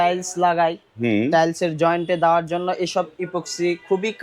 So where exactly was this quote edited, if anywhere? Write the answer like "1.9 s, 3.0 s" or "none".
none